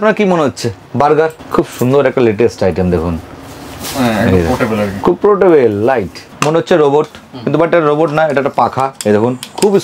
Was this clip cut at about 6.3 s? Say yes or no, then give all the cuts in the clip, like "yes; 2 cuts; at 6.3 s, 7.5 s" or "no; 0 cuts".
yes; 2 cuts; at 1.4 s, 6.3 s